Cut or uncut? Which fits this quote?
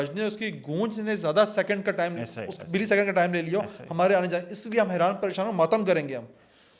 uncut